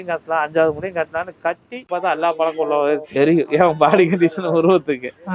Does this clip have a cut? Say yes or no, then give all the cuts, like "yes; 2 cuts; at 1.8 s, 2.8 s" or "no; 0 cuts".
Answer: yes; 1 cut; at 1.9 s